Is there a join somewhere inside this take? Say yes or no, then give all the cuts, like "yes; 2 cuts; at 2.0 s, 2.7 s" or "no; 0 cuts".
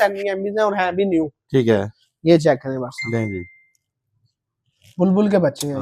no; 0 cuts